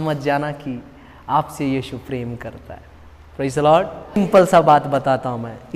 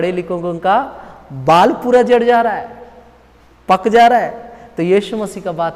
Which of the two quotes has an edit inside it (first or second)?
first